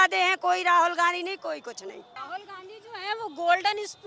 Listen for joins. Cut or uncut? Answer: cut